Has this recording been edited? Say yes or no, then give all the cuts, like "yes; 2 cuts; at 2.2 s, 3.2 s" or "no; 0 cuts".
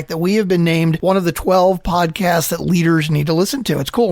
yes; 1 cut; at 1.0 s